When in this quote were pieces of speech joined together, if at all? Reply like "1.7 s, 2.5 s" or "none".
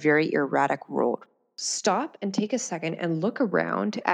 1.3 s